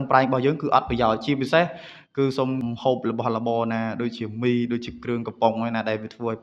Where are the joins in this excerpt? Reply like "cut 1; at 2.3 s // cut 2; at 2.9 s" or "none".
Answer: cut 1; at 2.6 s